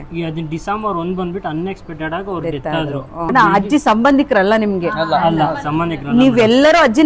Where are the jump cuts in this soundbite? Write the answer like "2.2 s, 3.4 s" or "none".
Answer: 3.3 s